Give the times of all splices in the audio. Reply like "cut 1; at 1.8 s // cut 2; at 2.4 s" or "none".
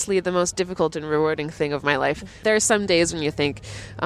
cut 1; at 2.4 s